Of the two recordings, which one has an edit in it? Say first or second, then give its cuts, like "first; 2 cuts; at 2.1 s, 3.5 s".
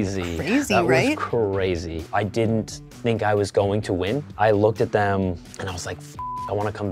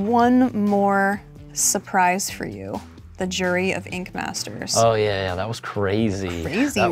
first; 1 cut; at 1.9 s